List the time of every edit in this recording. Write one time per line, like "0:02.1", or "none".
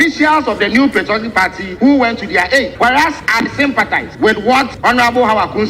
0:01.6
0:03.0
0:04.1
0:04.7